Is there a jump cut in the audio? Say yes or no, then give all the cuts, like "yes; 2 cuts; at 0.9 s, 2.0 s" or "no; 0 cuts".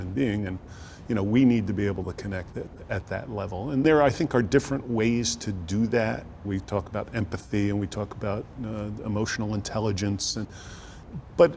yes; 2 cuts; at 3.8 s, 6.5 s